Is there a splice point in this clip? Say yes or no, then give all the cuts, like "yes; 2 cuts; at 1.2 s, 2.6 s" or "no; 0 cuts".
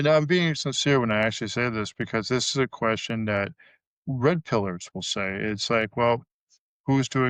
no; 0 cuts